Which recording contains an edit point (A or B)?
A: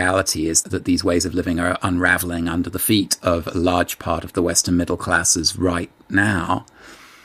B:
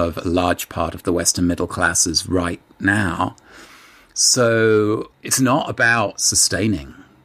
B